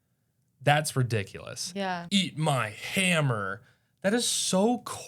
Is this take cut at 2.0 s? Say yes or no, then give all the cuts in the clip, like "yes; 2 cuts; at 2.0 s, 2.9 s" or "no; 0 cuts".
yes; 1 cut; at 2.0 s